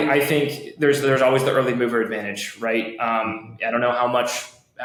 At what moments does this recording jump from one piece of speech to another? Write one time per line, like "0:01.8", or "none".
none